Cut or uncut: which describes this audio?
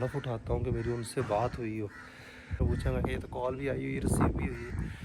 cut